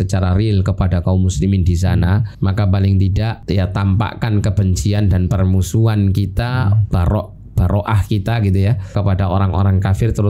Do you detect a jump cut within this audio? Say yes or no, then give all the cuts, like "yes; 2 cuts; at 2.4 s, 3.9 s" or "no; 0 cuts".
yes; 3 cuts; at 2.3 s, 3.4 s, 8.9 s